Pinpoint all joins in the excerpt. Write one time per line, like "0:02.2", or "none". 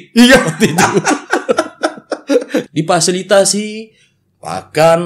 0:02.6